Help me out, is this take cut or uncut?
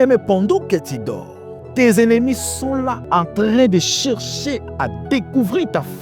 cut